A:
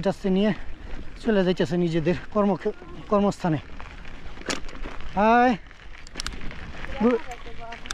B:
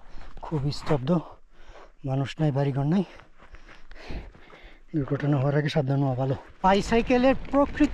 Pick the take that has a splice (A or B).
B